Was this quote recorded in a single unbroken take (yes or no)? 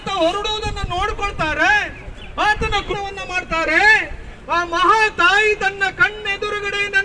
no